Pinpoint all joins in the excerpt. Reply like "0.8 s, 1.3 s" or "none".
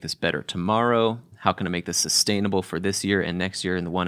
1.3 s